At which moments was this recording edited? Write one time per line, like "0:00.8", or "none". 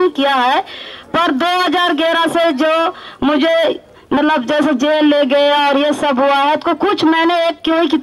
0:05.7